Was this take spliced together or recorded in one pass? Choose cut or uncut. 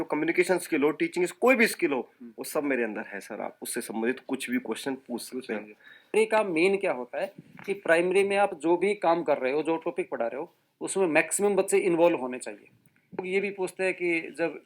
cut